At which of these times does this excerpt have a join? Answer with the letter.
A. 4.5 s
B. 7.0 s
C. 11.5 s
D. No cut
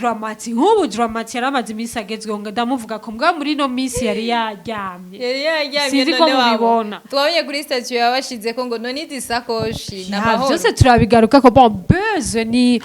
D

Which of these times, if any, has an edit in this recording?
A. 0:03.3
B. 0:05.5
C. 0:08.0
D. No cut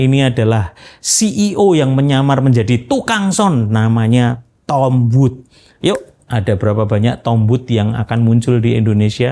D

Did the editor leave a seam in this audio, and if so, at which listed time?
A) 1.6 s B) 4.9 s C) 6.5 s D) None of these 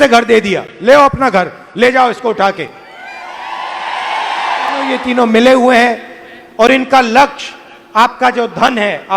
B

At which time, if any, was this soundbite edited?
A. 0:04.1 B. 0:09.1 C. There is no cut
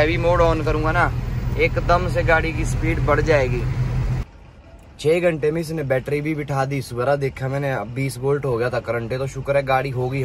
A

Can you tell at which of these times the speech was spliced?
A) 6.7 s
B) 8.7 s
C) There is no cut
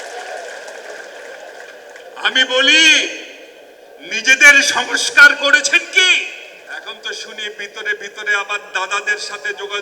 A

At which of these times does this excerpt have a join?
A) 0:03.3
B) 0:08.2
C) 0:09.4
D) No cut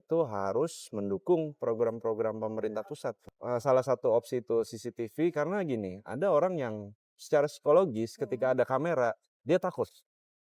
A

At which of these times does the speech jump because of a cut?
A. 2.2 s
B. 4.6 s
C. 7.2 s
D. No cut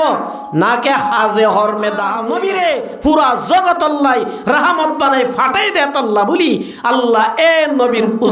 A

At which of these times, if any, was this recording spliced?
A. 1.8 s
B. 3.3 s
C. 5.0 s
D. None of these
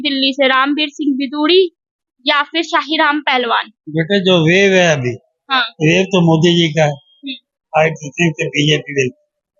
D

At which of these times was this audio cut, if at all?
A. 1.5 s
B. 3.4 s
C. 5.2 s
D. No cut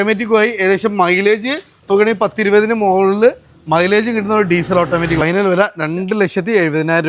C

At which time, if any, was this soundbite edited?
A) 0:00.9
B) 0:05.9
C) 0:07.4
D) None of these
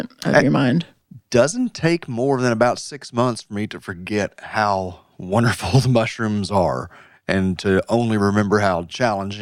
A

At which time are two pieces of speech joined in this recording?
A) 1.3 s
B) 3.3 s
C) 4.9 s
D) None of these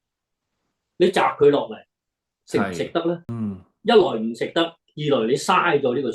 B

